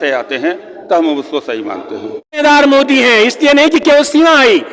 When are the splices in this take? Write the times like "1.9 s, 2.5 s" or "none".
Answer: 2.4 s